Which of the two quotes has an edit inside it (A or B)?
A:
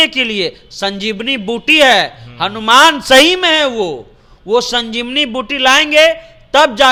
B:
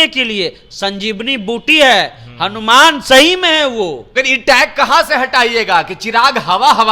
B